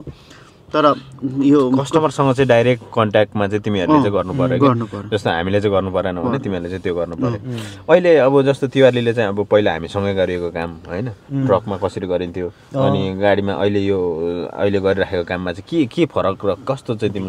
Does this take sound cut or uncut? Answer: uncut